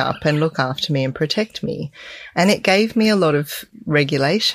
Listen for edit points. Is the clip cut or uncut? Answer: cut